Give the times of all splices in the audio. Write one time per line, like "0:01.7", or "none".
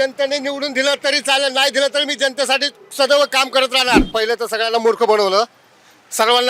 0:04.1